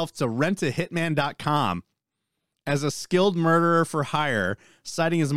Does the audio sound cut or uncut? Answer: uncut